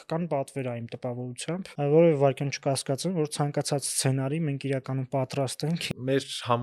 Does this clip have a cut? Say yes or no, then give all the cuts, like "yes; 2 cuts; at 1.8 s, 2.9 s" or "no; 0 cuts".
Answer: yes; 2 cuts; at 1.6 s, 5.9 s